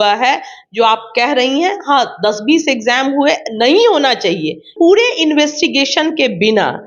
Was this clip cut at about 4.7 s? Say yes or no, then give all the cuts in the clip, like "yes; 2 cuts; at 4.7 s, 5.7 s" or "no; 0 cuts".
yes; 1 cut; at 4.7 s